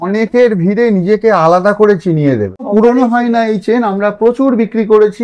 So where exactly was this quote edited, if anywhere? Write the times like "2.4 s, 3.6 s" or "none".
2.7 s